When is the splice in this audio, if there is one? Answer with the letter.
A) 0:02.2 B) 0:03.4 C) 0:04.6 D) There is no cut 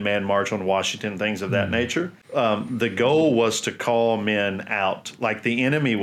A